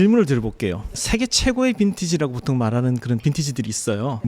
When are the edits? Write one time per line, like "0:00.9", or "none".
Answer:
0:00.9